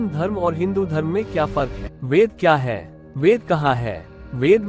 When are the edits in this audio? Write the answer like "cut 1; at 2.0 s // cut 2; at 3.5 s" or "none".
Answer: cut 1; at 1.9 s